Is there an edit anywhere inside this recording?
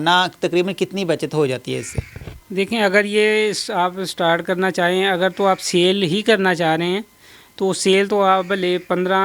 no; 0 cuts

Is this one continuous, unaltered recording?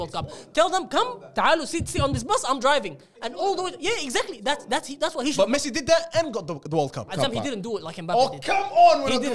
no; 1 cut; at 7.1 s

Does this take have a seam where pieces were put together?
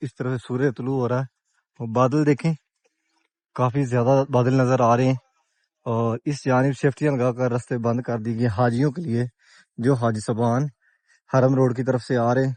no; 0 cuts

